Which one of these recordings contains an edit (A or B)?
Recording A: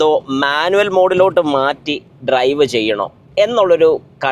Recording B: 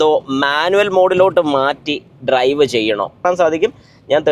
B